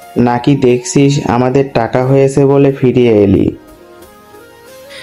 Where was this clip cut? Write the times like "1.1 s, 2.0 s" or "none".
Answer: none